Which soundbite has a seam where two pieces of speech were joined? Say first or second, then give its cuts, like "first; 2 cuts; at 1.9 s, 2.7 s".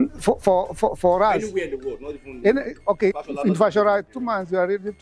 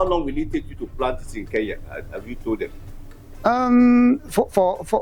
first; 1 cut; at 3.2 s